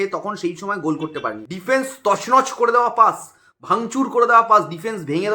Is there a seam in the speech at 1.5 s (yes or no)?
yes